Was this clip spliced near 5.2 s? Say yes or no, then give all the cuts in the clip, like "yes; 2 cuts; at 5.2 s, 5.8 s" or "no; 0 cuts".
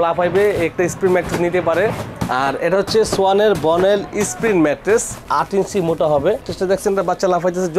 no; 1 cut; at 6.5 s